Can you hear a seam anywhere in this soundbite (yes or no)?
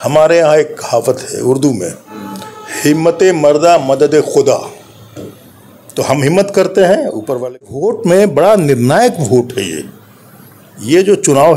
yes